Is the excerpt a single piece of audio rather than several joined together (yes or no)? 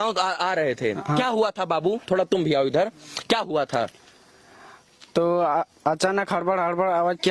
yes